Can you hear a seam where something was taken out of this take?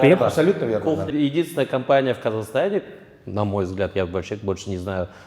yes; 1 cut; at 1.1 s

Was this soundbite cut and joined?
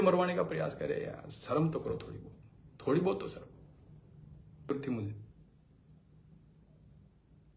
yes; 1 cut; at 4.7 s

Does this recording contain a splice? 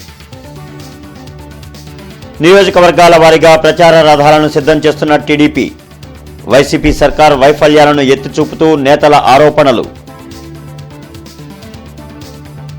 yes; 2 cuts; at 1.7 s, 10.2 s

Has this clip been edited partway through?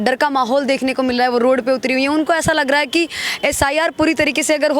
no; 0 cuts

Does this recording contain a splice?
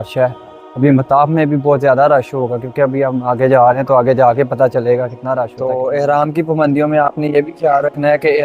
yes; 1 cut; at 5.5 s

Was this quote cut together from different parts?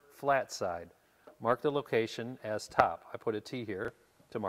no; 0 cuts

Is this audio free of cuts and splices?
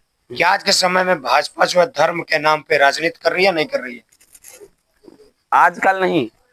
yes; 0 cuts

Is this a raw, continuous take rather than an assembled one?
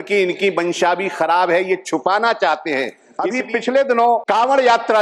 no; 2 cuts; at 3.1 s, 4.2 s

